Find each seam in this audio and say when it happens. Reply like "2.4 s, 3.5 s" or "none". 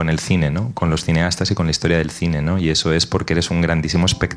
none